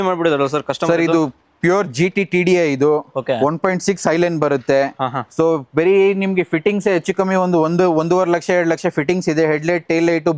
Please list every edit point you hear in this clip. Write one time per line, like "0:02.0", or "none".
none